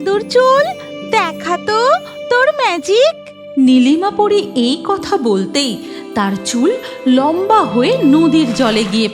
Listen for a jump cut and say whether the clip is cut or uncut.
uncut